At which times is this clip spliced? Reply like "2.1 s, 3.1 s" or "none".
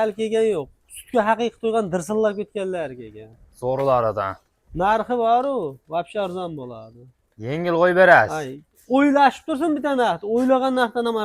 none